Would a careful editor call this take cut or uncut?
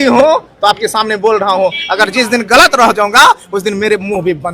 uncut